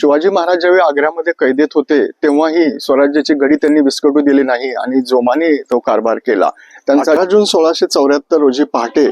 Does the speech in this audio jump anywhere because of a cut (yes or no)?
yes